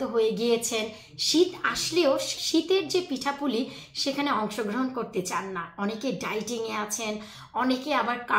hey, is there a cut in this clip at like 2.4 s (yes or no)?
yes